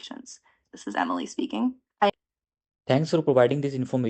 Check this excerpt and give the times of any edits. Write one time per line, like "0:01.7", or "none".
0:02.1